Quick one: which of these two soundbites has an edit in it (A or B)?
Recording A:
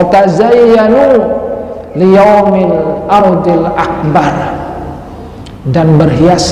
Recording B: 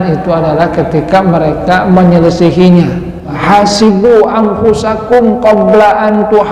B